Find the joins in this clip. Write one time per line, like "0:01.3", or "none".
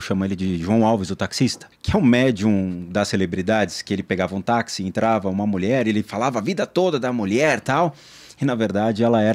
0:01.7